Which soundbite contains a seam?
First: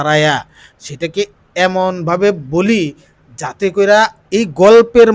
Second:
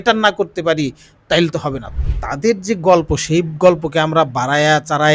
second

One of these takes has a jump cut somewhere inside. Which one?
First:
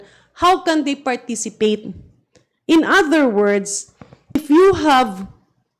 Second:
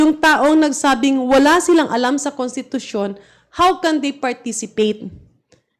first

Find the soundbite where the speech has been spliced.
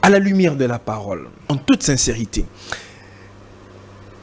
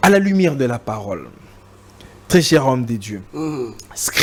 first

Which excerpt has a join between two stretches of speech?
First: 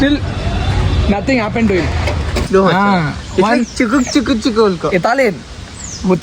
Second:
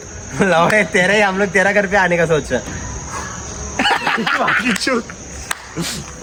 first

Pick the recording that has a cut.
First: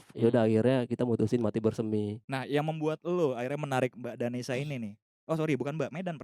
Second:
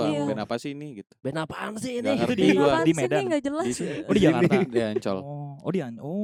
first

